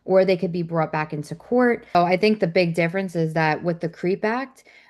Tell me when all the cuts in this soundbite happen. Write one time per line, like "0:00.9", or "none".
0:01.9